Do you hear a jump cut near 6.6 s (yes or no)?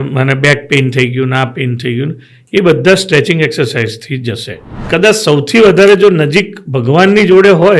no